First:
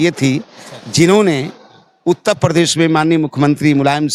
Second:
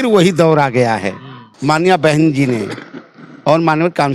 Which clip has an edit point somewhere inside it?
second; 1 cut; at 1.4 s

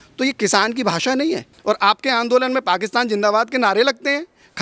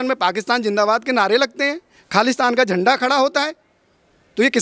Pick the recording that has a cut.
first; 1 cut; at 1.5 s

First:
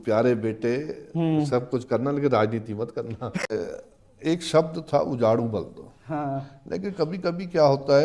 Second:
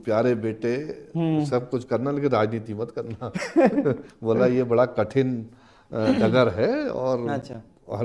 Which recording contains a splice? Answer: first; 1 cut; at 3.5 s

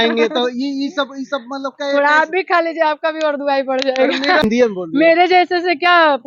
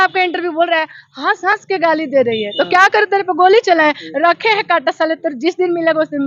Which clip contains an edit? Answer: first; 1 cut; at 4.4 s

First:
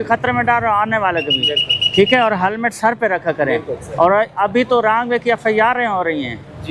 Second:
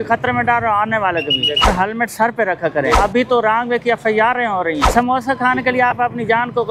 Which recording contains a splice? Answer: second; 3 cuts; at 1.7 s, 3.0 s, 4.8 s

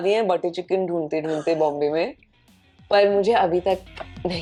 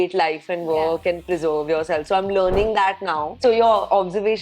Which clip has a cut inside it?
second; 1 cut; at 3.3 s

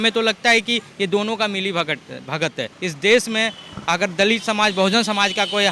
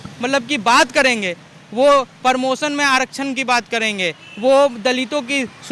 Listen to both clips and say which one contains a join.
first; 1 cut; at 2.8 s

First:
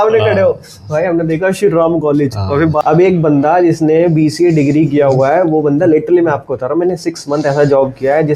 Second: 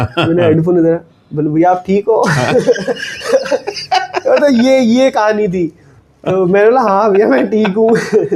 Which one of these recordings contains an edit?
first; 1 cut; at 2.8 s

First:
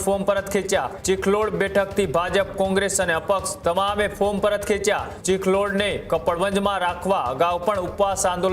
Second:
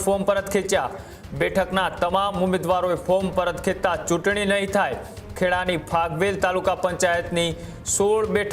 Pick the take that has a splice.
first; 2 cuts; at 0.9 s, 5.1 s

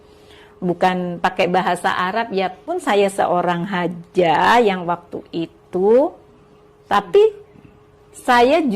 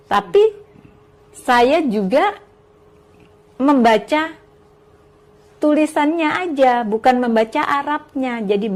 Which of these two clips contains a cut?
first; 1 cut; at 2.7 s

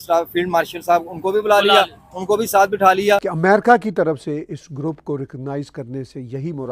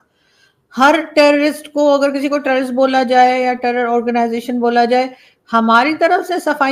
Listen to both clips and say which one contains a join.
first; 1 cut; at 3.3 s

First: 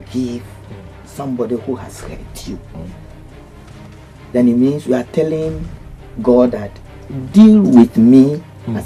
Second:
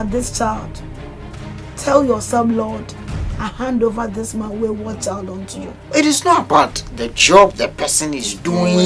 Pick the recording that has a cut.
second; 1 cut; at 5.7 s

